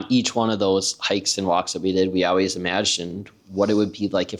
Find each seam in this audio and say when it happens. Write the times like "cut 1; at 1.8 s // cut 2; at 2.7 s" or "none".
none